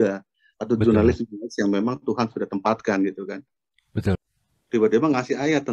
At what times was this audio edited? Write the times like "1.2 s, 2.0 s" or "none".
4.2 s

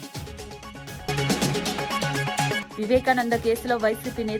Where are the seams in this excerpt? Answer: 1.1 s, 2.6 s

